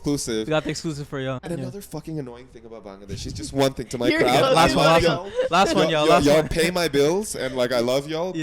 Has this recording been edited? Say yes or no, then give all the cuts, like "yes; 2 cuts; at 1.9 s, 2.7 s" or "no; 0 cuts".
yes; 1 cut; at 1.4 s